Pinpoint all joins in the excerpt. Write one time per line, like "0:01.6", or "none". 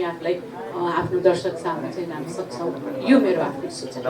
none